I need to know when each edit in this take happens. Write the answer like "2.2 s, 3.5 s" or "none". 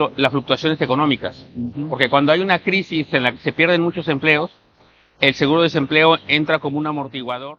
none